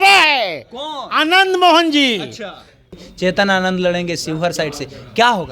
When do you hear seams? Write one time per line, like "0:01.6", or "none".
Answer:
0:02.9